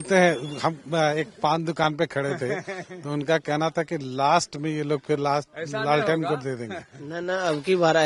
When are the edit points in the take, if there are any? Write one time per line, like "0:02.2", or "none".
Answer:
none